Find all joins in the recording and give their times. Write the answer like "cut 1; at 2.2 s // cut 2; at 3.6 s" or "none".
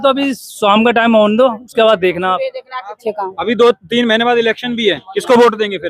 cut 1; at 3.0 s